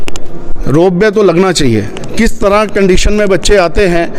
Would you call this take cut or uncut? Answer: uncut